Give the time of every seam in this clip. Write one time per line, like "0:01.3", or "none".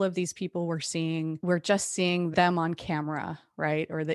0:01.4
0:02.3

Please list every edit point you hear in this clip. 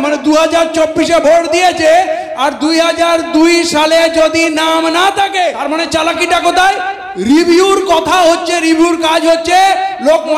0:05.6

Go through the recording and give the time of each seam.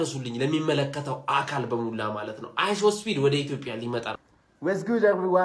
0:04.2

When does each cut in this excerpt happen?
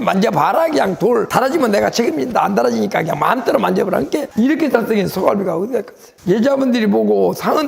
0:04.3

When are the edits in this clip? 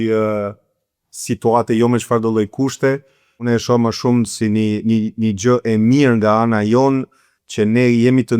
0:03.4

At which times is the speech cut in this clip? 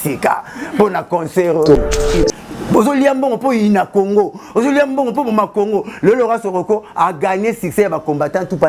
0:02.2

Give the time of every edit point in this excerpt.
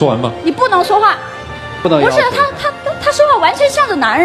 0:01.8

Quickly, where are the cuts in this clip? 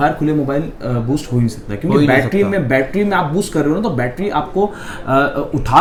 none

